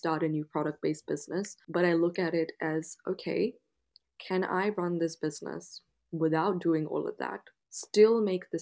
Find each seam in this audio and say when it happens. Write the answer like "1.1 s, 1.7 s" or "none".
1.6 s